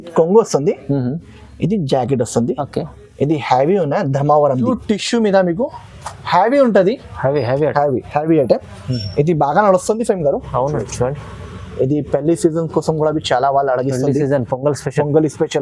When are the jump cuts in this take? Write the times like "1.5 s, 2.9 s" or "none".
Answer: 4.7 s